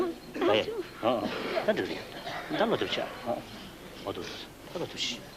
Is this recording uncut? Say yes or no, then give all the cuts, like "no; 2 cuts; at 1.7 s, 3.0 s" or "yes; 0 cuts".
yes; 0 cuts